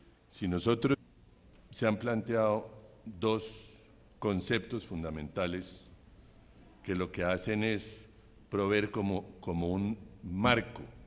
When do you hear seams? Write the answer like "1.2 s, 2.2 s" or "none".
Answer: none